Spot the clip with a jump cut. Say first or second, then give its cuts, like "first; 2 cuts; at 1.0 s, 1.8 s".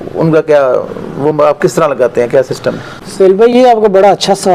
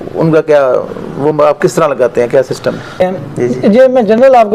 second; 1 cut; at 3.0 s